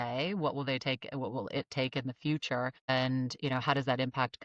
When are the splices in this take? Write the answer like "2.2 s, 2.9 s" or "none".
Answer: 2.9 s